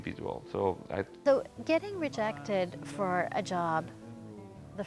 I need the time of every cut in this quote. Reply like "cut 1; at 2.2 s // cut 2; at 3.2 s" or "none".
cut 1; at 1.1 s